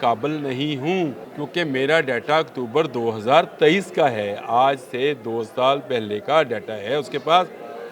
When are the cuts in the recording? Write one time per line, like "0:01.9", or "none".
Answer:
0:01.3